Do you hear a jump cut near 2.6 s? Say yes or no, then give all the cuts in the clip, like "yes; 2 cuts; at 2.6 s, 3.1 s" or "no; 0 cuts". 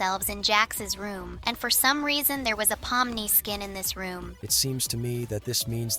no; 2 cuts; at 1.3 s, 4.4 s